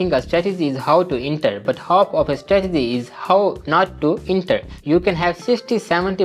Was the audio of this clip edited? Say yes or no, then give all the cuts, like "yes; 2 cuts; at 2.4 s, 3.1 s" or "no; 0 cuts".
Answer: yes; 1 cut; at 4.7 s